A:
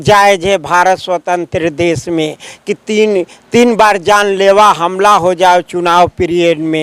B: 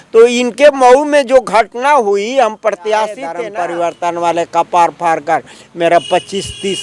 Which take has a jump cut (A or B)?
B